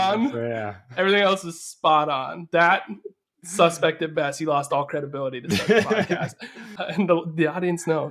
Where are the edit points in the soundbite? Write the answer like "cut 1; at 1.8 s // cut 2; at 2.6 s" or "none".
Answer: none